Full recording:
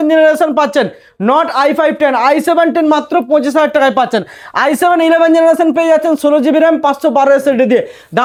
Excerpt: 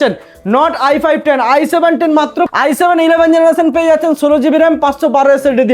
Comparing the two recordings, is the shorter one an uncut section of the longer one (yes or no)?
no